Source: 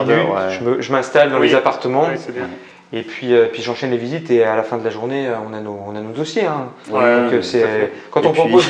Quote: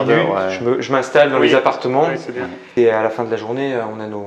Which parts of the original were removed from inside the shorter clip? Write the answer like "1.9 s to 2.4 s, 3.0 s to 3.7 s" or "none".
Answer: 2.6 s to 4.2 s